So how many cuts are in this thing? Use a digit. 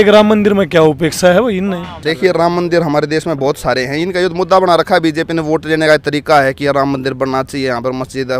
1